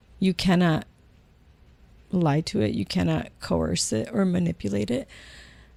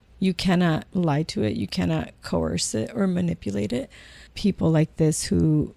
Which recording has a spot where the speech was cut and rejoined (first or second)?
second